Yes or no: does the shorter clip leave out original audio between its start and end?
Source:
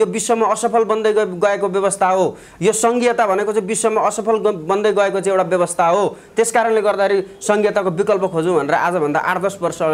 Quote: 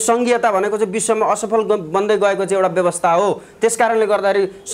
no